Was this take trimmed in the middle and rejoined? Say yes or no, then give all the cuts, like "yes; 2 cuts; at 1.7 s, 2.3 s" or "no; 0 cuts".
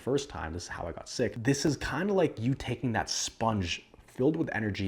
yes; 1 cut; at 1.4 s